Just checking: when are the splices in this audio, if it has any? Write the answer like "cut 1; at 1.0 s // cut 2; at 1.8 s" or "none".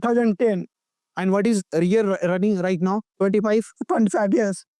cut 1; at 3.1 s